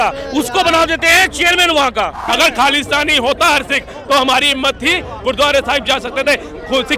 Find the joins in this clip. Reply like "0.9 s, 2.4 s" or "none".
2.2 s

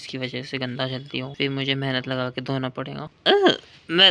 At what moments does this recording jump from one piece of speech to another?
1.3 s

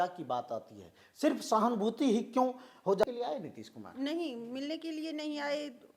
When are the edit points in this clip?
3.0 s

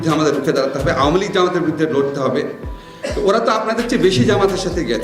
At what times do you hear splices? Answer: none

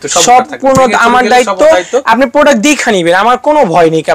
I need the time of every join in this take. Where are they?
none

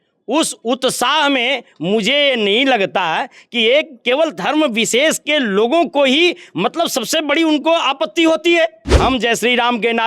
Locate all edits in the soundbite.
8.8 s

